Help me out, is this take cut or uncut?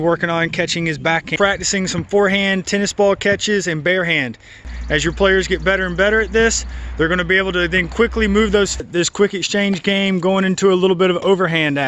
cut